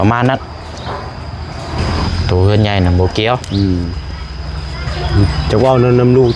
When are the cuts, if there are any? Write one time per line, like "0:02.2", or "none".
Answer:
0:02.1